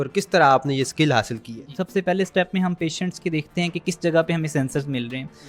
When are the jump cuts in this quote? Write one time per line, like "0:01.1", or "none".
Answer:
0:01.8